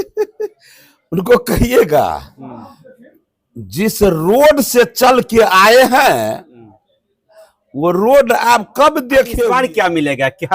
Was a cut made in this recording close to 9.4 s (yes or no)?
yes